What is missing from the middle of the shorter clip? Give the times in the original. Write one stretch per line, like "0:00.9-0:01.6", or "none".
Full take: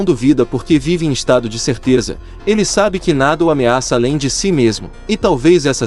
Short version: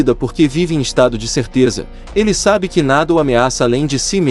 none